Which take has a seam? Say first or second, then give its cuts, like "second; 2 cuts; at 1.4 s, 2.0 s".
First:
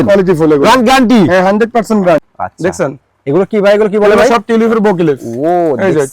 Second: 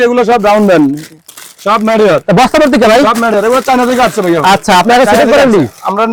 first; 1 cut; at 2.3 s